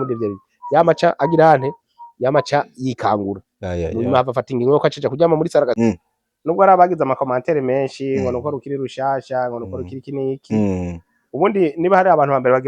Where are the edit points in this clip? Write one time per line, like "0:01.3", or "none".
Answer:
0:05.9